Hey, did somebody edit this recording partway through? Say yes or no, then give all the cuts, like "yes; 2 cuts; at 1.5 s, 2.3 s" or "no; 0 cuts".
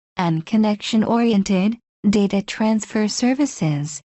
no; 0 cuts